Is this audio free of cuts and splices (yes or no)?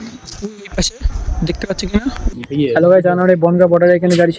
no